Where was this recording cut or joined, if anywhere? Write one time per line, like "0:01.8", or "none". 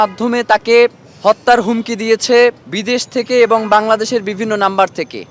0:01.1
0:02.7